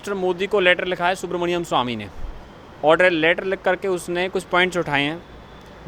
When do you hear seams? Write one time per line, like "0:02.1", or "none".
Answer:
none